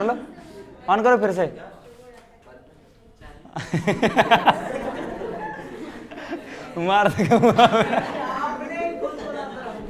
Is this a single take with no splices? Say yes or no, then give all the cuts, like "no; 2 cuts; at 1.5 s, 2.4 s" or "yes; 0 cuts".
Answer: yes; 0 cuts